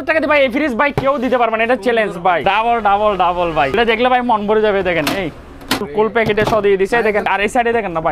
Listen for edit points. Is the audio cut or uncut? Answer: cut